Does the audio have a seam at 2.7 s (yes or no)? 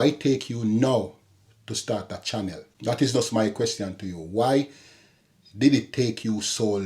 yes